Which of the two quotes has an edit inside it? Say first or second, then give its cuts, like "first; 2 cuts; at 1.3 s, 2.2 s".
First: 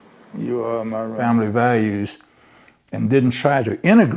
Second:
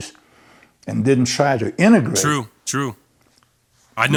first; 1 cut; at 1.1 s